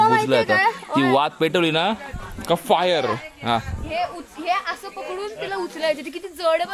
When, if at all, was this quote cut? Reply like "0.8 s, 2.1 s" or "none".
none